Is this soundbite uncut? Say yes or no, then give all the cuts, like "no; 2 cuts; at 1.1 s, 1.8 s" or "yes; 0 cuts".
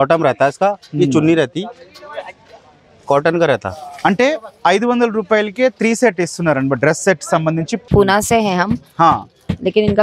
no; 1 cut; at 7.8 s